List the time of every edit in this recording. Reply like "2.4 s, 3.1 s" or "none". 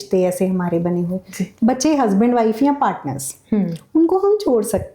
1.4 s